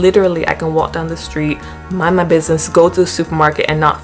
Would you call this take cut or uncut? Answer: uncut